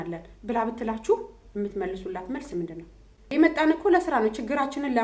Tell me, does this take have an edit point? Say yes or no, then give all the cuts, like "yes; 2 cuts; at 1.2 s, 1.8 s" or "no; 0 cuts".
yes; 1 cut; at 3.3 s